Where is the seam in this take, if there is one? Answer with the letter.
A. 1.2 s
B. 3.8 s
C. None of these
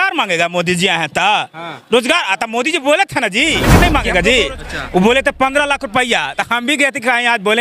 B